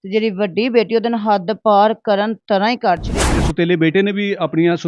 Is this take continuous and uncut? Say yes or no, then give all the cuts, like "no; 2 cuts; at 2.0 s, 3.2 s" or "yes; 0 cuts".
no; 1 cut; at 3.4 s